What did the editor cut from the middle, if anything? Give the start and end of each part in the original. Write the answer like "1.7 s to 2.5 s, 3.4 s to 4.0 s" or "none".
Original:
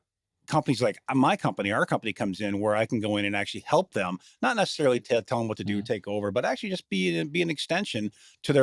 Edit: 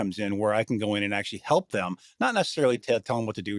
none